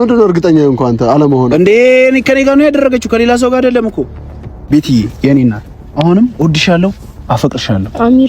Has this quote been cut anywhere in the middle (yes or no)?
yes